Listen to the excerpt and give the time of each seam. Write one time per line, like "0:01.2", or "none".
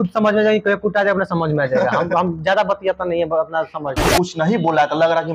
0:04.0